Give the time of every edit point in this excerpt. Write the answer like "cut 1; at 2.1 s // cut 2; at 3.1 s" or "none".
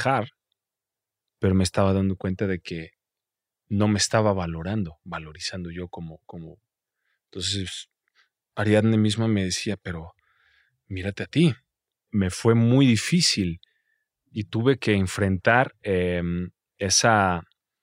cut 1; at 12.1 s